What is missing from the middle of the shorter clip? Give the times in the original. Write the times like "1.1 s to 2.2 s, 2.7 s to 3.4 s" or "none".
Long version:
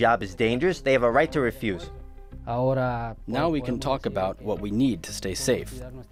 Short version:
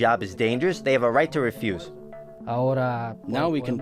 none